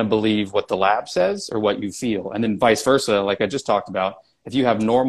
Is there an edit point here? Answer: no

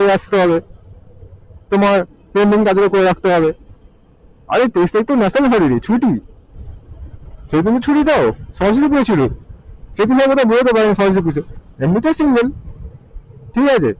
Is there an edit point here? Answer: no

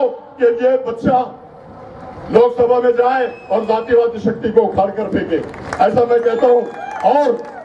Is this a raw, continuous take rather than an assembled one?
yes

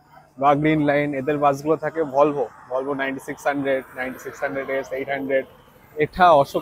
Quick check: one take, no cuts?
yes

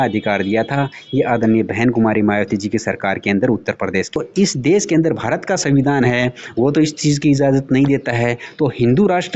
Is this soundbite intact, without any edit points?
no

